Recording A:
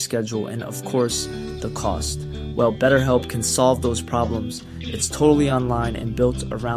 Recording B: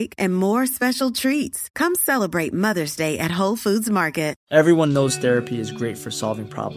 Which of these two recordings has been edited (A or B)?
B